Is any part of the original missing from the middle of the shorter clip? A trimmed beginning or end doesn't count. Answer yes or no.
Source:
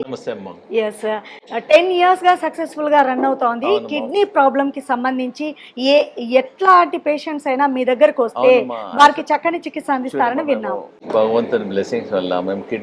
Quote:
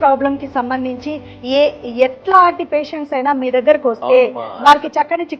no